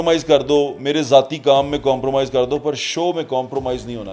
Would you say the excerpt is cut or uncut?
uncut